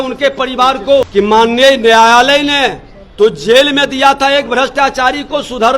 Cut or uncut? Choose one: cut